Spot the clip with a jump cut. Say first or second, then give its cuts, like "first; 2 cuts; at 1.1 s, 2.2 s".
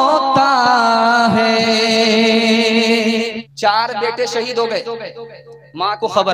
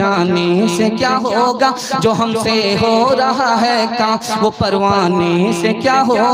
first; 1 cut; at 3.4 s